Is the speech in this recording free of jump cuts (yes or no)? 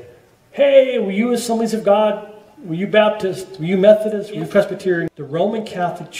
no